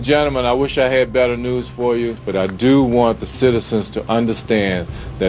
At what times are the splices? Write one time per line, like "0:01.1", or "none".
0:02.2